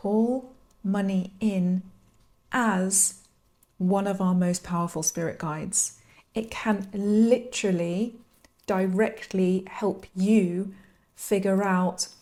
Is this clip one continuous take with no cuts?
yes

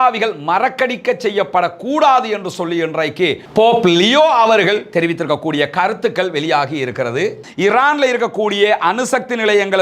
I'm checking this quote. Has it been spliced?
yes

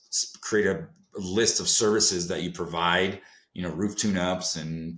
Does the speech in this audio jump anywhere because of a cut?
no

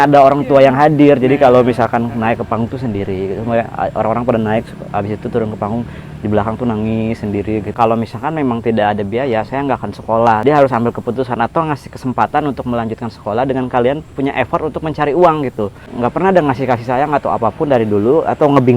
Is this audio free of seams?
no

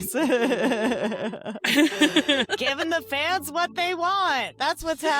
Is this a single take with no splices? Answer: no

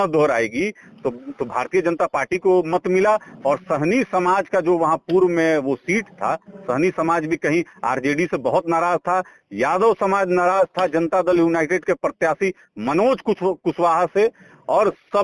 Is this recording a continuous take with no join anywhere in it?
yes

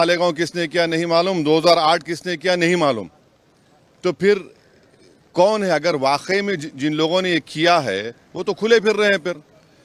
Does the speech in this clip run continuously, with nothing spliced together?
yes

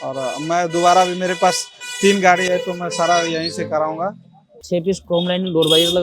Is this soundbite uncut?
no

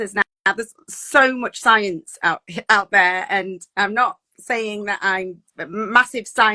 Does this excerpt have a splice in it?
no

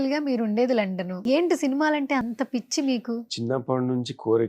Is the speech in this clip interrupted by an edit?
yes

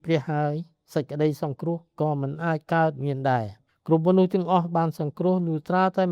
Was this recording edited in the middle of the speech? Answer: yes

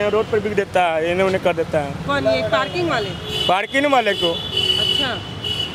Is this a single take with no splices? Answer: yes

